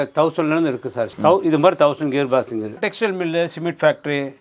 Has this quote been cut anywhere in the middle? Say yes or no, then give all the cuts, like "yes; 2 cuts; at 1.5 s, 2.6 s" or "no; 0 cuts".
yes; 2 cuts; at 1.1 s, 2.8 s